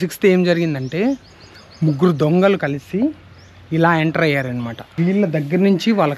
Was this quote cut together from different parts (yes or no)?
yes